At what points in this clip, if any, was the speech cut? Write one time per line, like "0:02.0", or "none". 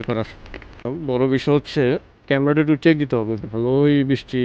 0:00.9
0:02.1